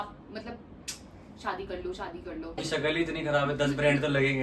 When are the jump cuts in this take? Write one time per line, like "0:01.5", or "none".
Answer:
0:02.6